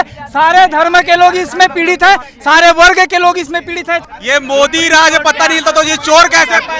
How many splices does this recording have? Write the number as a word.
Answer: one